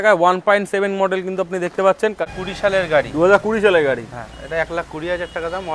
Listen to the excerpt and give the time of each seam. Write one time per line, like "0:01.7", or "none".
0:02.3